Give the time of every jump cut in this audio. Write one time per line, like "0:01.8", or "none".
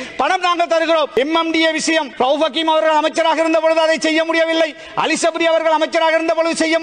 0:01.1
0:02.1